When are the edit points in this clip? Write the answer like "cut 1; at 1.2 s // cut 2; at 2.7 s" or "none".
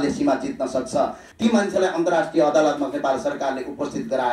cut 1; at 1.2 s